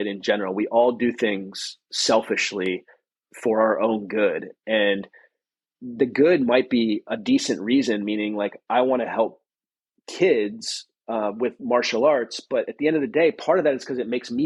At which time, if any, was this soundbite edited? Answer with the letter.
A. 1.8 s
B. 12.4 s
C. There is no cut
C